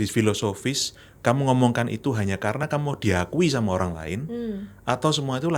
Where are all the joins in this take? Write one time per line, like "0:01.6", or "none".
none